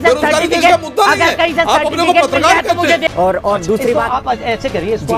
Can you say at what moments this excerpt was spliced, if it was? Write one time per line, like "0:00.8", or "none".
0:03.0